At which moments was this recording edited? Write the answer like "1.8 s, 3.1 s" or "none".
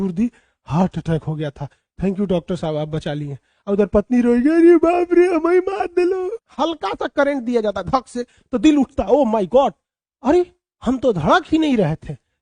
6.4 s